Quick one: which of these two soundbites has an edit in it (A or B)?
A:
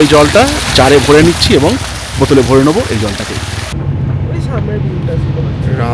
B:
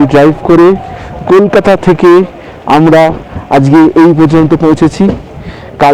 A